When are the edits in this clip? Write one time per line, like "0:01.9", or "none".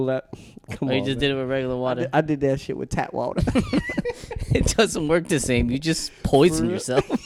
none